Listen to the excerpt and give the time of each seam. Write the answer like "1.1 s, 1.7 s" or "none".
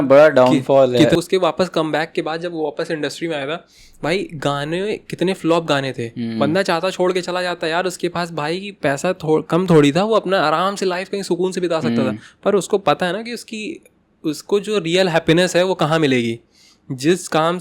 1.1 s